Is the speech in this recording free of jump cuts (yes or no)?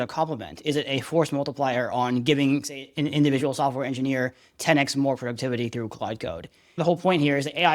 no